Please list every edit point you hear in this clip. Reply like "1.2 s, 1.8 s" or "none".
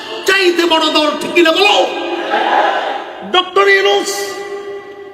3.1 s